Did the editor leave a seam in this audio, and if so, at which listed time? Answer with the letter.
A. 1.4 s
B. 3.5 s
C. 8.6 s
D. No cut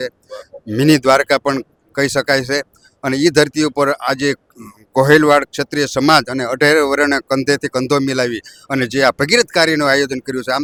D